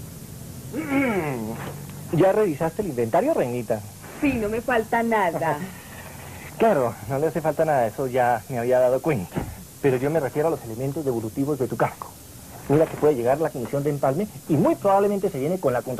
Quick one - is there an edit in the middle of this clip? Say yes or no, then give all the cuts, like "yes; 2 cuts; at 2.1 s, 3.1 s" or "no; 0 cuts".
yes; 1 cut; at 6.3 s